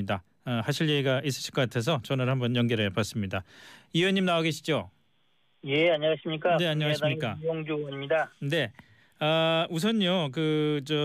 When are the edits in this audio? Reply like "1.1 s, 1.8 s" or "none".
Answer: 6.3 s